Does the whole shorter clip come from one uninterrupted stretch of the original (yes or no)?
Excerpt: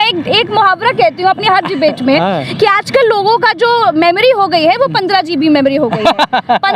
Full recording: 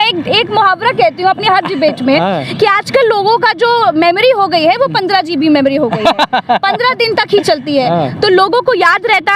yes